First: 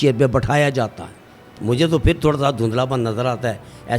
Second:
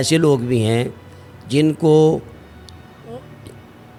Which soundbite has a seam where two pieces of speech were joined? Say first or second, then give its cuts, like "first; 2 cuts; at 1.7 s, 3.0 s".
first; 1 cut; at 1.5 s